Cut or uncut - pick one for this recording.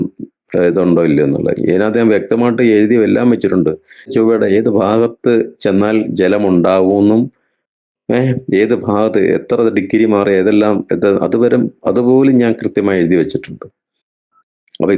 cut